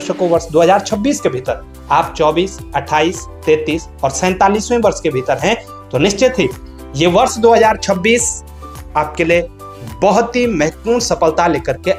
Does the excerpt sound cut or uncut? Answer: uncut